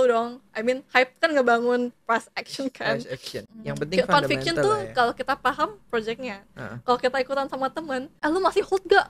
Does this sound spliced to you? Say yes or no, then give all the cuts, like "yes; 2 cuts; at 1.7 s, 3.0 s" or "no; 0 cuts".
yes; 2 cuts; at 3.4 s, 8.1 s